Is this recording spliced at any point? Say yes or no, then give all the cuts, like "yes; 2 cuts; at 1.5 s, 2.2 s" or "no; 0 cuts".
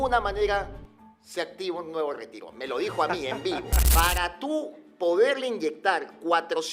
yes; 1 cut; at 3.8 s